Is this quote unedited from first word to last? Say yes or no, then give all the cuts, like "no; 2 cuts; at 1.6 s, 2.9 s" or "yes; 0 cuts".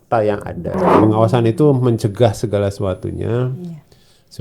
no; 1 cut; at 1.1 s